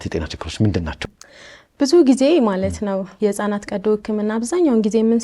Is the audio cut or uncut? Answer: cut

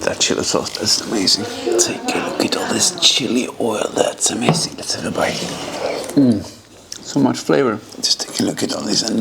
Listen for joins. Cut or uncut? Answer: cut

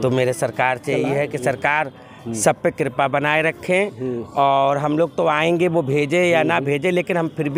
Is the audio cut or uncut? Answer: uncut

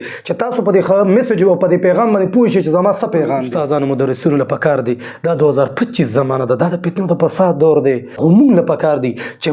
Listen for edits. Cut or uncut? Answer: cut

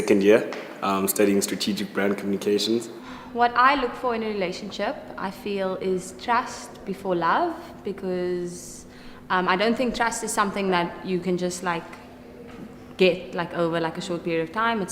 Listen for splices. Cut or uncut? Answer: cut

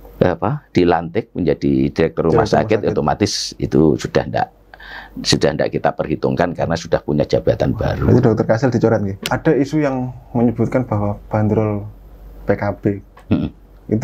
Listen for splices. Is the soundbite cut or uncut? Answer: cut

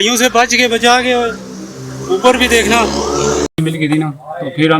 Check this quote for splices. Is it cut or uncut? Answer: cut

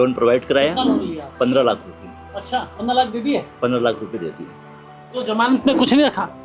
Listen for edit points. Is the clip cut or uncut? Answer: uncut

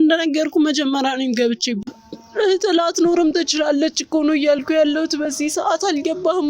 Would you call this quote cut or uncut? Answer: cut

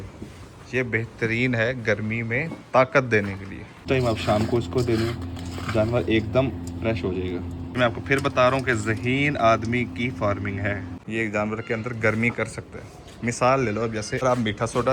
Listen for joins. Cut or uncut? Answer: cut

